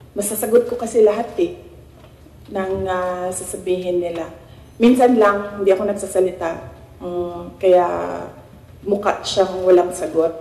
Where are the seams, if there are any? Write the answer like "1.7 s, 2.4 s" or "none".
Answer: none